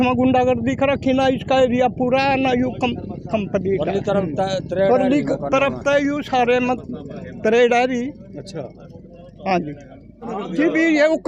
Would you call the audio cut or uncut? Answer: cut